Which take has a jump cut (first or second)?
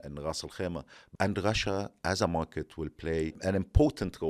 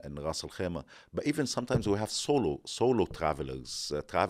first